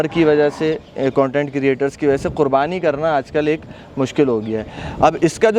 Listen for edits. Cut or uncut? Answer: uncut